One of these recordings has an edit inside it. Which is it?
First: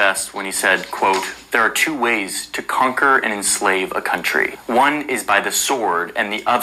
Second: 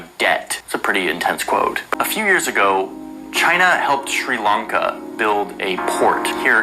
second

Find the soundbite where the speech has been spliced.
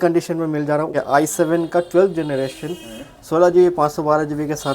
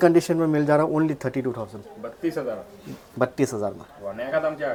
first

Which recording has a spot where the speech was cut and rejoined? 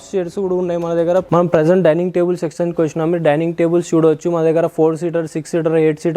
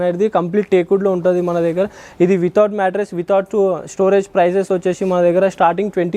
first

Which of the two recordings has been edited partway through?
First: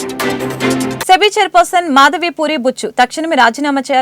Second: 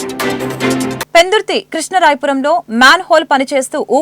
first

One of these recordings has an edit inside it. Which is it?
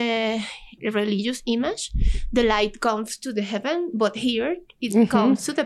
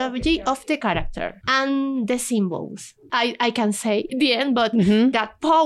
second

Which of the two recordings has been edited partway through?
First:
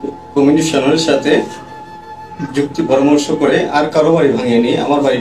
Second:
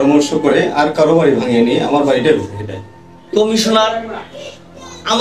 second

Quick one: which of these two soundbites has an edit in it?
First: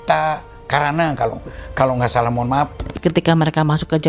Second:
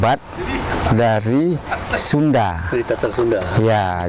first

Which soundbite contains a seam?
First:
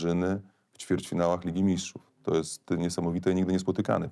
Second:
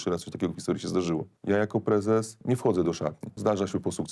second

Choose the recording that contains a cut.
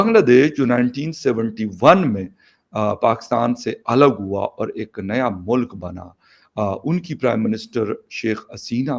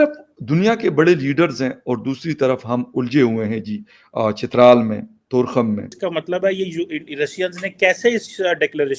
second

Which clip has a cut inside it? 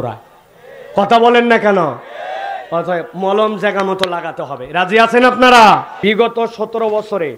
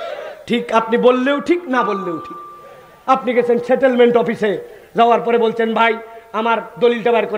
first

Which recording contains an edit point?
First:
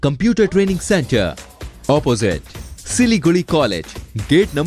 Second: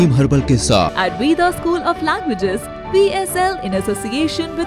second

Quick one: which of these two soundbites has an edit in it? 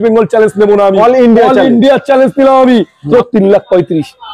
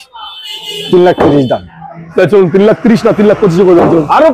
first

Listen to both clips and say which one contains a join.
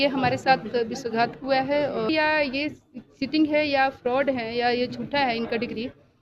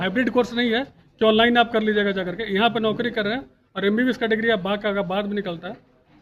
first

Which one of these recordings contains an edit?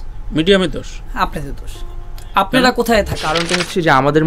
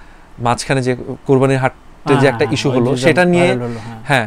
first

